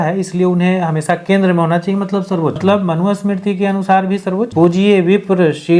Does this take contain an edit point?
yes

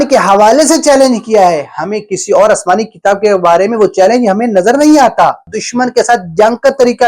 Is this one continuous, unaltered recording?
no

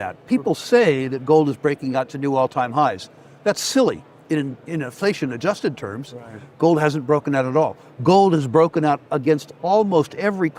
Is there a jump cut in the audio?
no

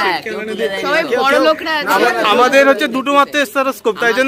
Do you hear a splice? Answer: no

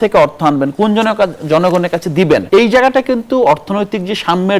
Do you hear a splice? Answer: yes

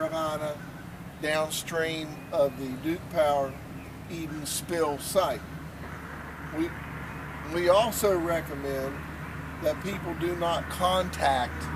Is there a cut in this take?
yes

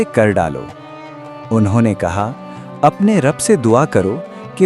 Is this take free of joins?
yes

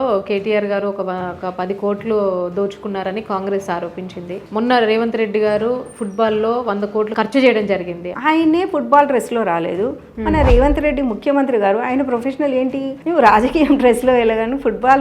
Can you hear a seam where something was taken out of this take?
yes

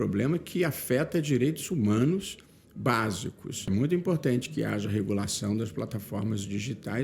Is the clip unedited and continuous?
no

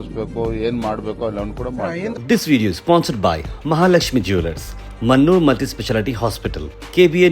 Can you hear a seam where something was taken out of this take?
yes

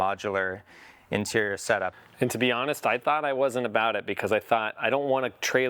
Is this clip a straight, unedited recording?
no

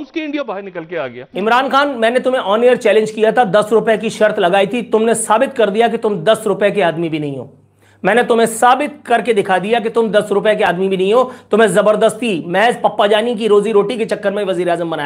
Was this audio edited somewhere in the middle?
yes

